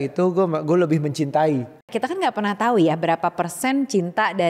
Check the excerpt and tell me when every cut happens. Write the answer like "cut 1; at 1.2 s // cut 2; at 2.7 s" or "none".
cut 1; at 1.9 s